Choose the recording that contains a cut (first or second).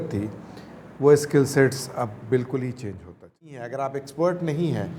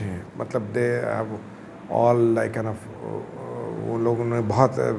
first